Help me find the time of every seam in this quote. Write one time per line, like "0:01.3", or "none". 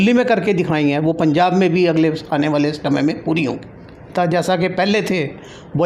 0:04.1